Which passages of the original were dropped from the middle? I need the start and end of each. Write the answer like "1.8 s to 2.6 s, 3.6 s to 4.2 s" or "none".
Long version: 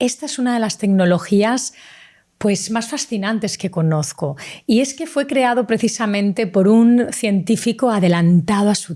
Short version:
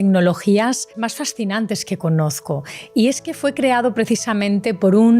1.8 s to 2.7 s